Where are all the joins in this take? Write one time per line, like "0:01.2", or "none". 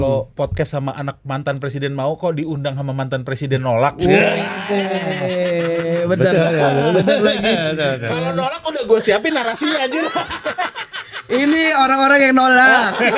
none